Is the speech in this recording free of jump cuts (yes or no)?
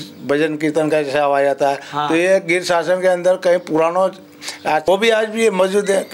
no